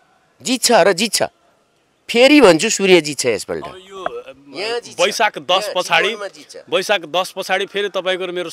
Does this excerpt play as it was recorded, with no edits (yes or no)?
yes